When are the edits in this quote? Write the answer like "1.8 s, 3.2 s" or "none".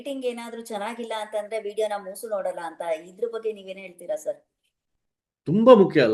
none